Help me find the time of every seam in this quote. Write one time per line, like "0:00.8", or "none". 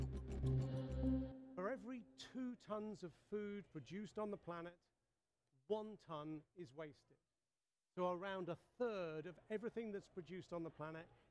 0:01.3